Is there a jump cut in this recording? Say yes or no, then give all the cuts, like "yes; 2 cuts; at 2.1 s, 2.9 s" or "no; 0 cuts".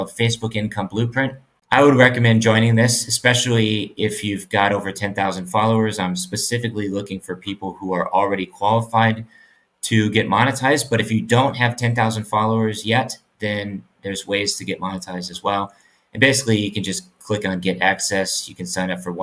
yes; 1 cut; at 1.5 s